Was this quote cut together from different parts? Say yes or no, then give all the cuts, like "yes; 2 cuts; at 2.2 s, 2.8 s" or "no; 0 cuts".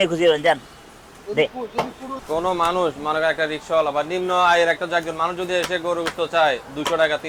yes; 1 cut; at 2.2 s